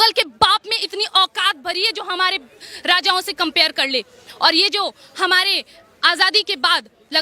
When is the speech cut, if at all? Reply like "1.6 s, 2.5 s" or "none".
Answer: none